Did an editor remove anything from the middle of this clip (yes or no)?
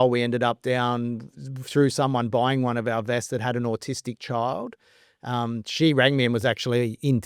no